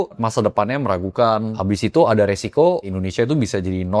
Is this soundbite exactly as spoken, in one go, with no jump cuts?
no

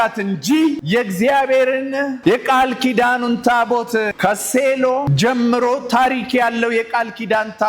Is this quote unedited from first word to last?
no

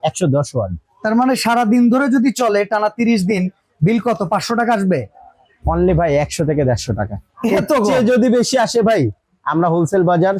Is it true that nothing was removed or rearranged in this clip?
yes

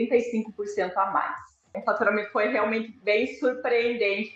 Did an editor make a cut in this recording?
yes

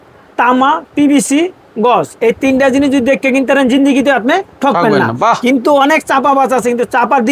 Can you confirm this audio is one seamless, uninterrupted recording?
yes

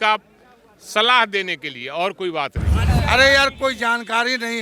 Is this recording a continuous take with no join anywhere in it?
no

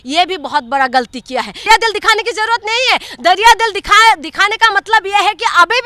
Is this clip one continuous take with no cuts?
no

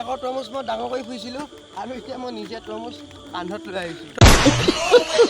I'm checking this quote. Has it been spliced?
yes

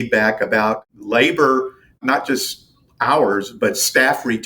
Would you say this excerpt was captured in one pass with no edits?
no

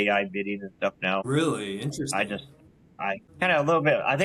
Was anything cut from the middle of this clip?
no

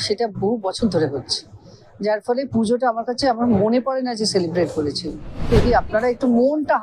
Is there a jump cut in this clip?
yes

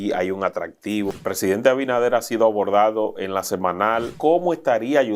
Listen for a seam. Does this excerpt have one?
yes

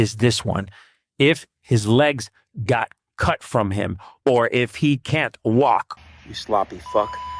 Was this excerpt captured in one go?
no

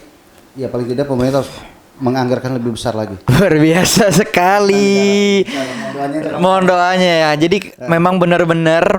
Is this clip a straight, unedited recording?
no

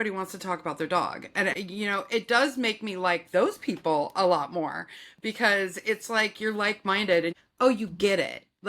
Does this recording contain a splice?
yes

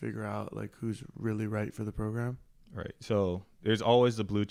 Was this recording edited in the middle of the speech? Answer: no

